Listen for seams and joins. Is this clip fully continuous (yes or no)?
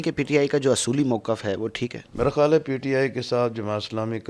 no